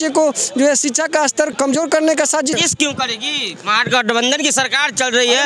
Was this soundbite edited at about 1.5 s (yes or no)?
yes